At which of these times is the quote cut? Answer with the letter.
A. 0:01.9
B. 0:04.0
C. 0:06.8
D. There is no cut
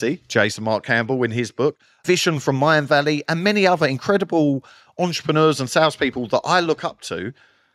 A